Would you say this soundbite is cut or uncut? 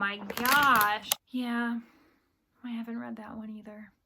cut